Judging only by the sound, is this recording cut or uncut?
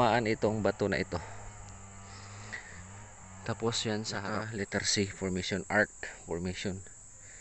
cut